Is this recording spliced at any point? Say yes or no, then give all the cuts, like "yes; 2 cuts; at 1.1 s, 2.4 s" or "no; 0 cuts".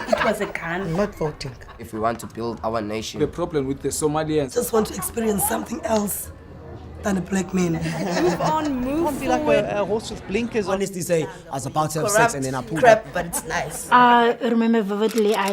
no; 0 cuts